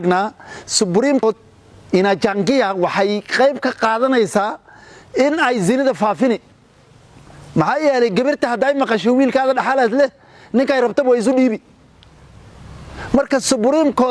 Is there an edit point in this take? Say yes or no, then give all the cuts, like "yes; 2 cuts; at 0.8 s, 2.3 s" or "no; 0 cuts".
yes; 1 cut; at 1.2 s